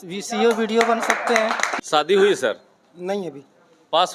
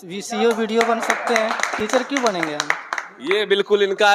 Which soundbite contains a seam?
first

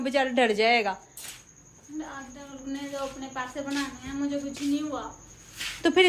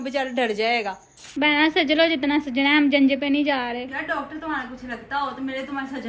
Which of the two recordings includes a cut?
second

